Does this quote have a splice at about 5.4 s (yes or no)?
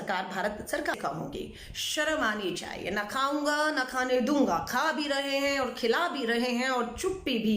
no